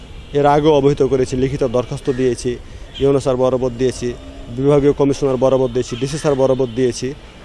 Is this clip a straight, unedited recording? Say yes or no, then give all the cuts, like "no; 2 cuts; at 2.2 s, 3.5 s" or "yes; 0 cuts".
yes; 0 cuts